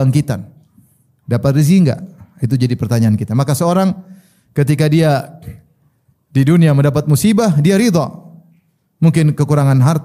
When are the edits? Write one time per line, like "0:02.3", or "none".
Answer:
none